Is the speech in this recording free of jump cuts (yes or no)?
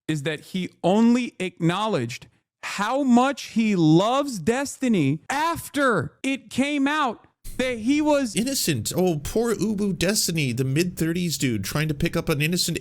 no